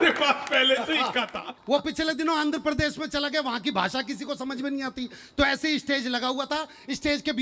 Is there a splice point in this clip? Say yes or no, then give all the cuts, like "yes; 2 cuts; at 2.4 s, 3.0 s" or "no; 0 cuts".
yes; 1 cut; at 1.5 s